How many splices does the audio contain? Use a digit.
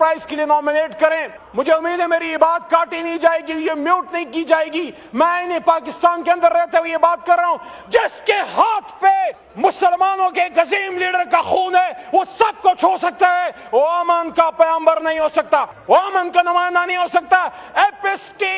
3